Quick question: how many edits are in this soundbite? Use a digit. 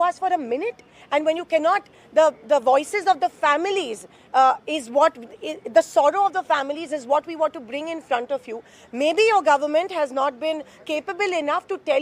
0